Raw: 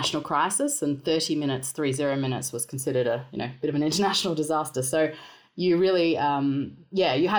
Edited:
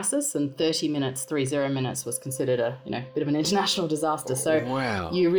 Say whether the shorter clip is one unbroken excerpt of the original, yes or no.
yes